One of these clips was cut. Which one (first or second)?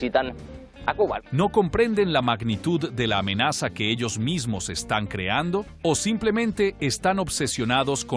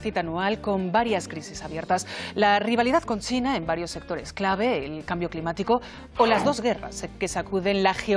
first